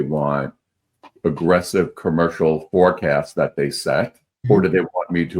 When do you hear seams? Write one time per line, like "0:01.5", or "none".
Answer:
0:04.3